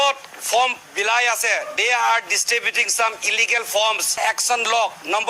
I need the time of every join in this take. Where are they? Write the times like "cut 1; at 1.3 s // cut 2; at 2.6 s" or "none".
cut 1; at 4.1 s